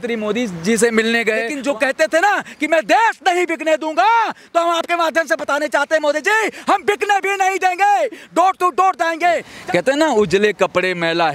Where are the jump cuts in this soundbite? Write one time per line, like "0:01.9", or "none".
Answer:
0:01.5
0:09.5